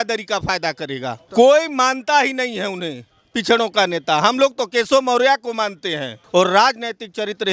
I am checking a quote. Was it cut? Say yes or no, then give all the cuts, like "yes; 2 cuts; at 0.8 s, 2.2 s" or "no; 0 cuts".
yes; 2 cuts; at 1.2 s, 6.1 s